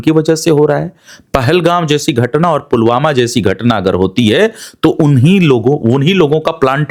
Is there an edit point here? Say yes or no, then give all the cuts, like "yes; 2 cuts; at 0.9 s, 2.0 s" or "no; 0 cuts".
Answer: no; 0 cuts